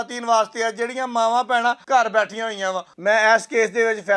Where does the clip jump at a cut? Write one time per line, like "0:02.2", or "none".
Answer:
0:01.8
0:02.9